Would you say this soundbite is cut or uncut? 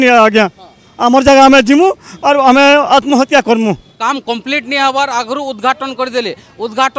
cut